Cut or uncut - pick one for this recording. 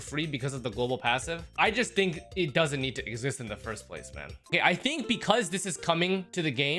cut